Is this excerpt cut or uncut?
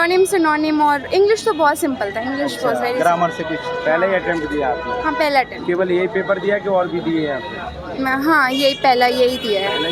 uncut